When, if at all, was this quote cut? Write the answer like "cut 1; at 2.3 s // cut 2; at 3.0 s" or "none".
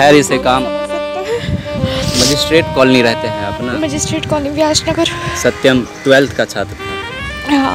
none